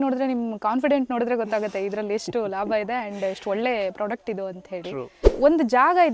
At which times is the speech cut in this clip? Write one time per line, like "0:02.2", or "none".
0:05.2